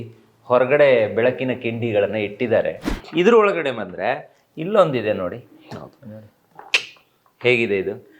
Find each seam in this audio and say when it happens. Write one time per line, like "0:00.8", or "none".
0:02.9